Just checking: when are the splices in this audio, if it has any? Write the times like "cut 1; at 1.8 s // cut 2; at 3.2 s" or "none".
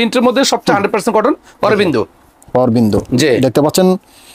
none